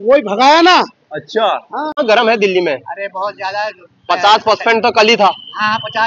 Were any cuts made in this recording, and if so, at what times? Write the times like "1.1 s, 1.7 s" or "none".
1.9 s